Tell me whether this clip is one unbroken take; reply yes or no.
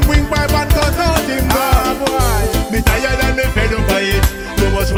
yes